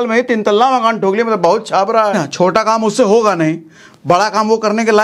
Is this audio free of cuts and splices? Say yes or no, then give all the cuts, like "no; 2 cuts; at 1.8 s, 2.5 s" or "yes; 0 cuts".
no; 1 cut; at 2.1 s